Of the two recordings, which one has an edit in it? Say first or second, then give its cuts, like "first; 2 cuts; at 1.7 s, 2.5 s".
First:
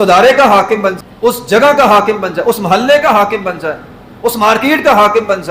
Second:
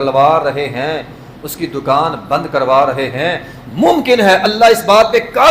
first; 1 cut; at 1.0 s